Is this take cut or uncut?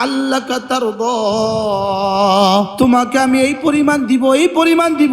cut